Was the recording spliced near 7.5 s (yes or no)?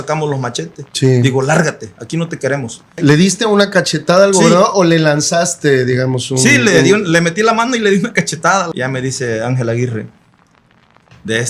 no